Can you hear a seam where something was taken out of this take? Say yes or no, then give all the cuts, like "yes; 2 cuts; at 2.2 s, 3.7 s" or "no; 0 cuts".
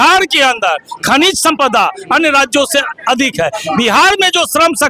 no; 0 cuts